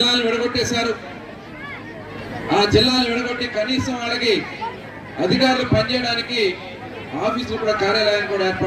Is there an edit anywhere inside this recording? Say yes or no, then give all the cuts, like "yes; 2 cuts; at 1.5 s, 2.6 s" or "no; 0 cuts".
no; 0 cuts